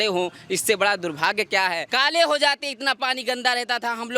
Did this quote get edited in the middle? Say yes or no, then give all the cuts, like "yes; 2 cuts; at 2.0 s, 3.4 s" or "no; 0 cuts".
yes; 1 cut; at 1.9 s